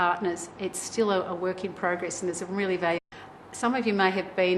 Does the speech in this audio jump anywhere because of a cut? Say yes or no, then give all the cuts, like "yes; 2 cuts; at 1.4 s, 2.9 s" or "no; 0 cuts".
no; 0 cuts